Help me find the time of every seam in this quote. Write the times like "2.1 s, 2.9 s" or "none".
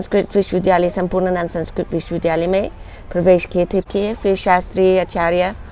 3.9 s